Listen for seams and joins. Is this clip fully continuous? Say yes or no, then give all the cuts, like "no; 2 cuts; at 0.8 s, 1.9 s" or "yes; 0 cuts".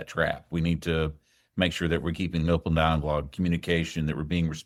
yes; 0 cuts